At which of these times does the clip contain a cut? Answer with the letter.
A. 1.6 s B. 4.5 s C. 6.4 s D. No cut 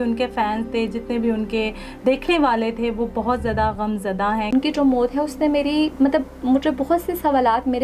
B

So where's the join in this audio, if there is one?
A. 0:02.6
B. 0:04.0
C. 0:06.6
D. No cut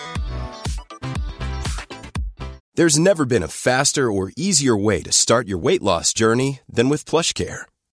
A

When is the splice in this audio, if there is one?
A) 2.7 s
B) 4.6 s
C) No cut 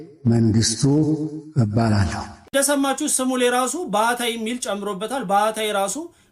C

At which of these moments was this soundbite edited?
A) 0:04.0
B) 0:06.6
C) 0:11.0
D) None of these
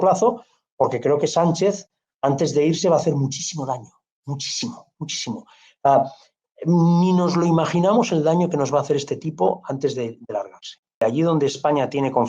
C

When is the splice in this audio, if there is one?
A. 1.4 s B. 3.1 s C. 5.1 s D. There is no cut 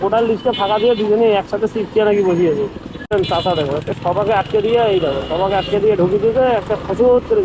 B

